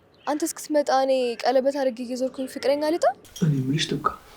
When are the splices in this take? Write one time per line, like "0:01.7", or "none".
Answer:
0:03.3